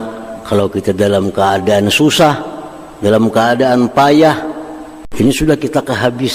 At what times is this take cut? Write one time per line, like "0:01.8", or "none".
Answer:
0:05.0